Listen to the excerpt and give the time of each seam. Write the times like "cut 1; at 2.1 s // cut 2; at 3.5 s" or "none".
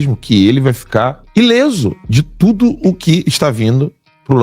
cut 1; at 1.2 s // cut 2; at 2.0 s